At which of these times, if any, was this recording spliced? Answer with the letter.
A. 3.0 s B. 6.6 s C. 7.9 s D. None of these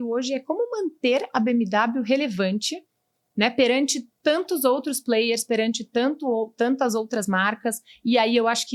D